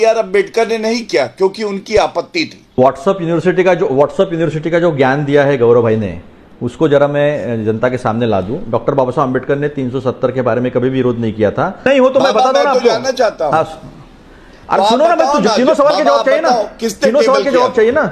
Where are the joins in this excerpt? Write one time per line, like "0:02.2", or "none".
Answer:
0:02.6
0:11.8